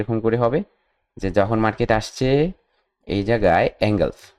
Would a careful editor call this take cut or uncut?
uncut